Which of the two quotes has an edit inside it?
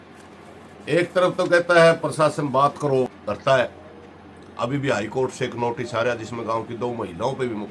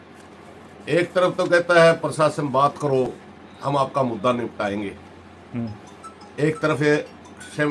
first; 1 cut; at 3.2 s

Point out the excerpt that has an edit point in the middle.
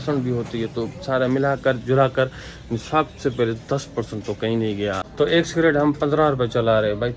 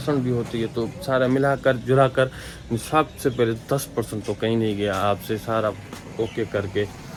first; 1 cut; at 5.0 s

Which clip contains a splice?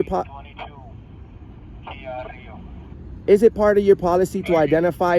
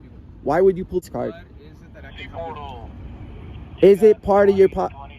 second; 1 cut; at 1.0 s

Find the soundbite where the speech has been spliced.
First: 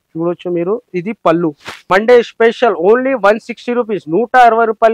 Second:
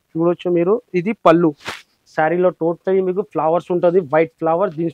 first; 1 cut; at 1.7 s

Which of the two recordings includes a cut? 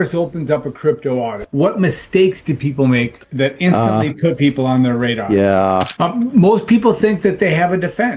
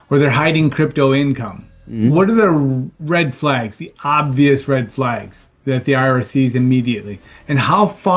first; 2 cuts; at 3.2 s, 5.9 s

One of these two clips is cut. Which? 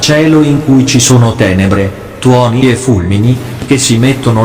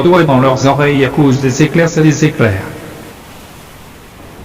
second; 1 cut; at 3.1 s

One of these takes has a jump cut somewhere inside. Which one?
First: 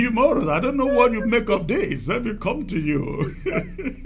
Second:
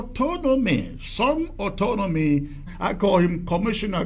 second; 1 cut; at 2.7 s

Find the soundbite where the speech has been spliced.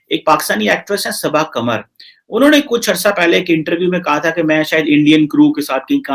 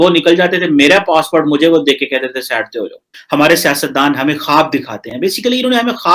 second; 1 cut; at 3.1 s

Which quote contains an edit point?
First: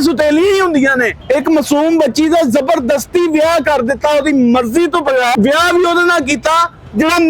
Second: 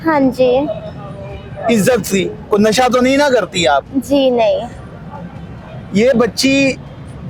first; 2 cuts; at 1.1 s, 5.3 s

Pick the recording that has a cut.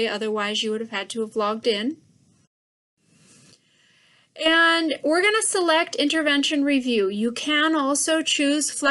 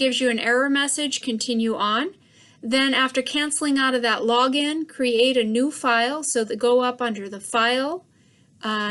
first; 1 cut; at 3.7 s

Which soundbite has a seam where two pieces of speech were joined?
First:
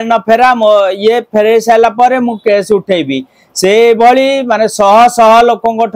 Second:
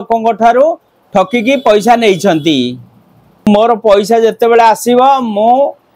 second; 1 cut; at 3.4 s

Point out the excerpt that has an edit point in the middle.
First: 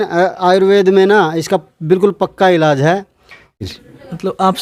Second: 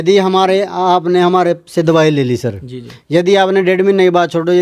first; 1 cut; at 3.6 s

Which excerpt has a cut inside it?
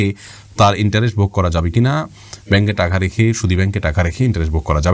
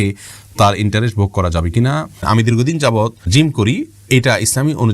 second; 2 cuts; at 2.2 s, 3.2 s

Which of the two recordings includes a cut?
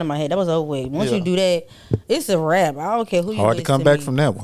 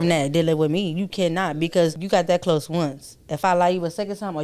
second; 1 cut; at 2.0 s

